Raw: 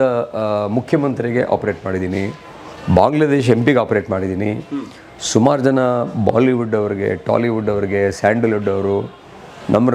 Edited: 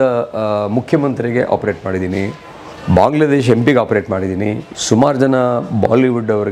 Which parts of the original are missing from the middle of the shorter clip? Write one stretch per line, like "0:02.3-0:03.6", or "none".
0:04.7-0:05.1